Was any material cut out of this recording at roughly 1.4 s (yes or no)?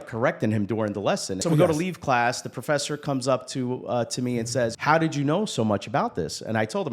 yes